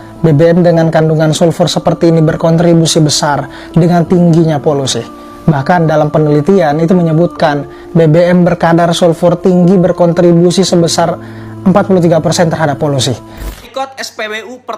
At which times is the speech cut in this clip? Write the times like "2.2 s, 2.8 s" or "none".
13.4 s